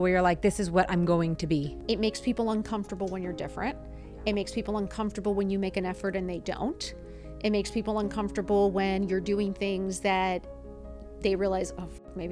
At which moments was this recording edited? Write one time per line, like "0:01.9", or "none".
0:01.7